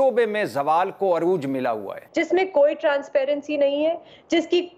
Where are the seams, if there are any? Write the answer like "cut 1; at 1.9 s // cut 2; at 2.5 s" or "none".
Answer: cut 1; at 2.0 s